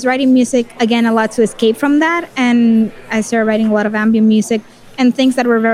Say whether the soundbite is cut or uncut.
cut